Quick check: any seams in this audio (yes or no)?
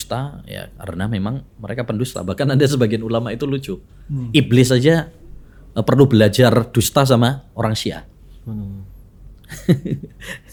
no